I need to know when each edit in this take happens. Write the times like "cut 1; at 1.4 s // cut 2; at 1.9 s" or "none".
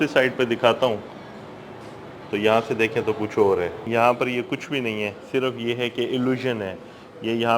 cut 1; at 3.8 s